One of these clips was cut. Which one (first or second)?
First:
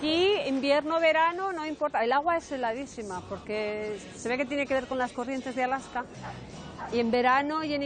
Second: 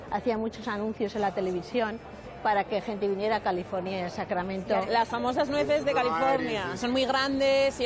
second